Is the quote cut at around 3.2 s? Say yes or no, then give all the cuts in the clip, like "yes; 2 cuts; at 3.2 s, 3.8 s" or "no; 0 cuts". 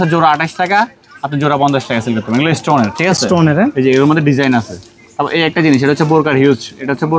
no; 0 cuts